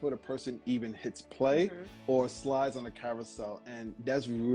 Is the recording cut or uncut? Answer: uncut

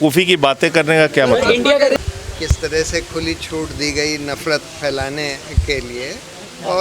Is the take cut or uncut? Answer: cut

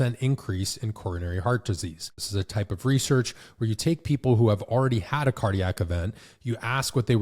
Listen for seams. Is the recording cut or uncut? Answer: cut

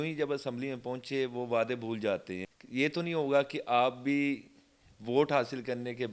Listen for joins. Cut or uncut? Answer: cut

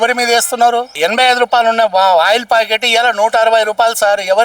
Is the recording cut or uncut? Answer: cut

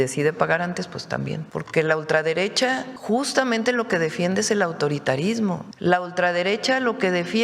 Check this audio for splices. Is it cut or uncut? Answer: cut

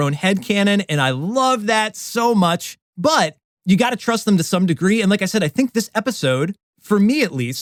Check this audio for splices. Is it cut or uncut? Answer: uncut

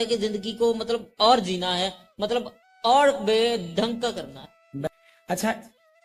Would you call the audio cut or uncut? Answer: cut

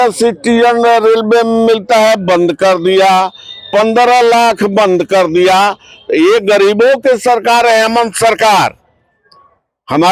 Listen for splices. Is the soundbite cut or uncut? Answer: uncut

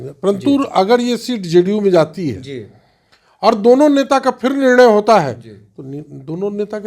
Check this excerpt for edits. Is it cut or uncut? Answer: uncut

